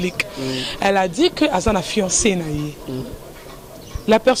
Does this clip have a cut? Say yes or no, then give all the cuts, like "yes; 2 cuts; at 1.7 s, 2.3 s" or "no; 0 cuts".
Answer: no; 0 cuts